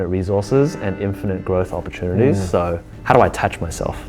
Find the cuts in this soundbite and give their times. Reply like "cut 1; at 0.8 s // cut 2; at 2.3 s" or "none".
cut 1; at 2.9 s